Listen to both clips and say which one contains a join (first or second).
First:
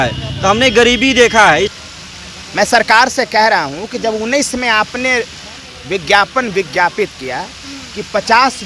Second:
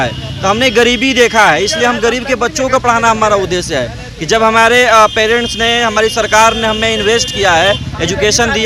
first